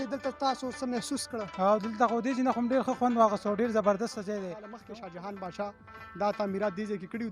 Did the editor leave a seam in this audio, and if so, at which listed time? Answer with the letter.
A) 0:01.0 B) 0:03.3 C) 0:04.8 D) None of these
C